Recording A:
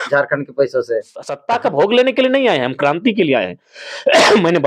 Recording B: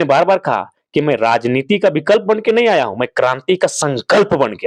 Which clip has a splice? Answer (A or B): A